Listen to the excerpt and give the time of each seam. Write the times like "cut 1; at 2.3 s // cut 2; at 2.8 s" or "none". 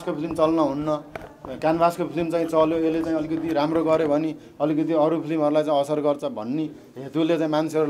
none